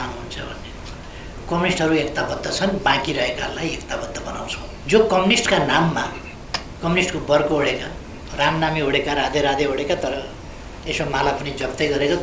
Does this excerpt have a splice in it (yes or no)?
yes